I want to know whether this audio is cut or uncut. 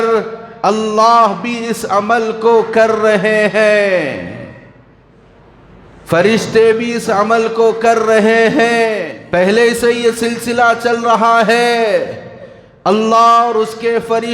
cut